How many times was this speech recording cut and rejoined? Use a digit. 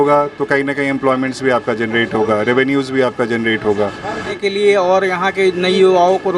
1